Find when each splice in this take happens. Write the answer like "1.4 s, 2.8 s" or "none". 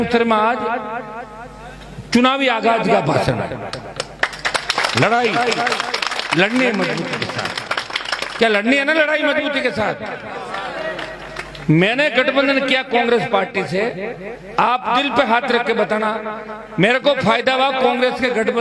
none